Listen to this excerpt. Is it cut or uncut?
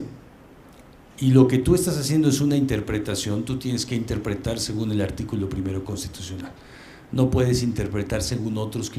cut